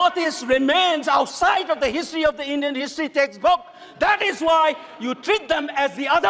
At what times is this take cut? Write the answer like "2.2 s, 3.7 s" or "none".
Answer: none